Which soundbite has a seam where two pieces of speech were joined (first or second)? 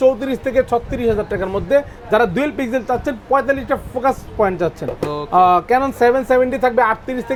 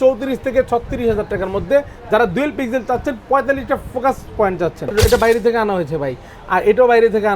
second